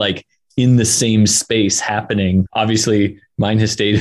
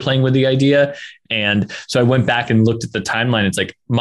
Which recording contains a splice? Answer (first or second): second